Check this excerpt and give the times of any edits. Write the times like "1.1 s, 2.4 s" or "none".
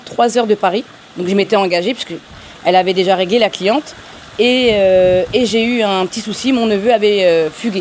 none